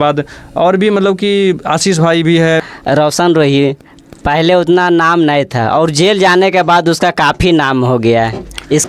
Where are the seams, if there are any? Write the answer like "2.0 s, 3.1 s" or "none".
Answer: 2.7 s